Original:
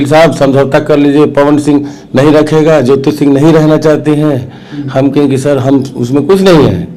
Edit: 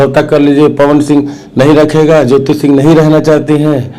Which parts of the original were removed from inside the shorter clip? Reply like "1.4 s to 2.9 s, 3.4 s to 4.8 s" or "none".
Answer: none